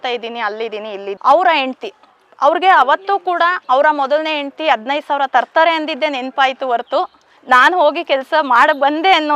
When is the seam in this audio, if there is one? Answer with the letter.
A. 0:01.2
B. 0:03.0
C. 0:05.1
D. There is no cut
A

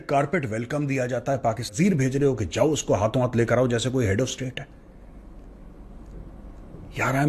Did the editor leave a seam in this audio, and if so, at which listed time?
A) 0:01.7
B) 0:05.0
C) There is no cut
A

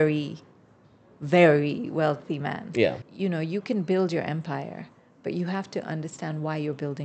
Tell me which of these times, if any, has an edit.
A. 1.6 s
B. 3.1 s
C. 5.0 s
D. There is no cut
B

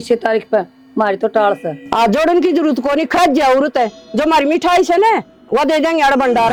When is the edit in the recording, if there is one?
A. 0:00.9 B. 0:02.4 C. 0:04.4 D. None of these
D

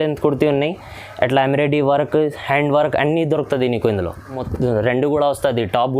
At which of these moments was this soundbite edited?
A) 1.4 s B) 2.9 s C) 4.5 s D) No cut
C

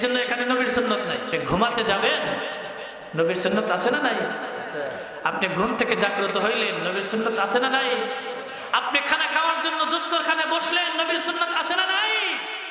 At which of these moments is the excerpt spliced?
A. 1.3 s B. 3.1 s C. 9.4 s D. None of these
A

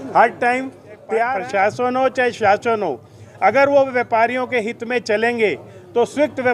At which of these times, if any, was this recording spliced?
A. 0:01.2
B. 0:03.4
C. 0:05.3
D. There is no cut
A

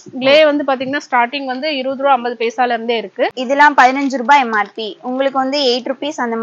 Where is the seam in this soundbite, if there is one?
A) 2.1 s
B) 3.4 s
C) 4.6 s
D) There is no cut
B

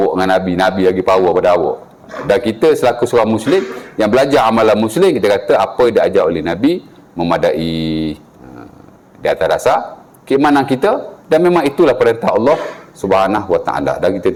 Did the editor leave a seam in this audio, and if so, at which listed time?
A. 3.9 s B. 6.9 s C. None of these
C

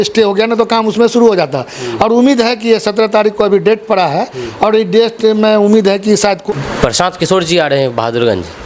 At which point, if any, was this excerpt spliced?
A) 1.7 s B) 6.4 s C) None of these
B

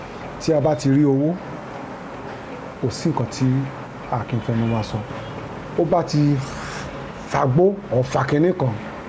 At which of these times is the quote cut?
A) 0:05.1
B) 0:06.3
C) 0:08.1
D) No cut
A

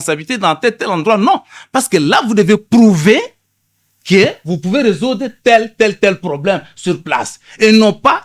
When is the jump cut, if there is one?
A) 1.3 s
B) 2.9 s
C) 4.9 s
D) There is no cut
D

